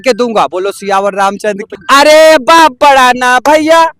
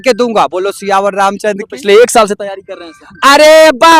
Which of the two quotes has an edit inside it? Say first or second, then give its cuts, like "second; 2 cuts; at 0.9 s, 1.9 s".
first; 1 cut; at 1.7 s